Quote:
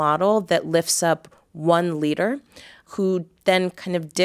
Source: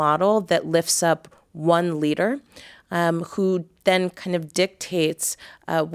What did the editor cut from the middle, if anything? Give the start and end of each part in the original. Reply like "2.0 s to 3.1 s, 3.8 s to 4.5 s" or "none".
2.9 s to 3.2 s